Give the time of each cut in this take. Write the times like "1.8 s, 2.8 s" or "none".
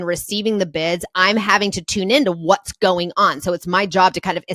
none